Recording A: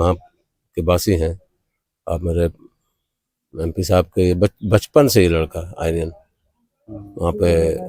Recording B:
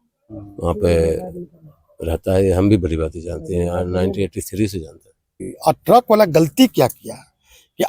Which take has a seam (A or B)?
B